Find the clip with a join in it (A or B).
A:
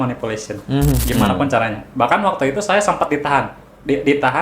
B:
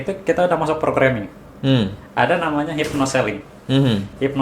A